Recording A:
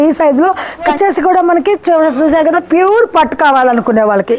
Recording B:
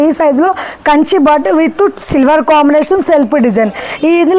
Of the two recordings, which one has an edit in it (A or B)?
A